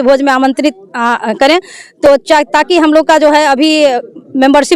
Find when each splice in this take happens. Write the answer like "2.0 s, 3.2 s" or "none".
none